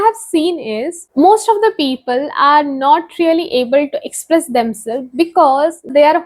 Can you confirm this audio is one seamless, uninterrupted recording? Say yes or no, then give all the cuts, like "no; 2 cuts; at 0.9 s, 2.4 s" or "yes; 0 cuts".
yes; 0 cuts